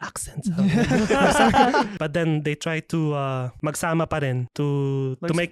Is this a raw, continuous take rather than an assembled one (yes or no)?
no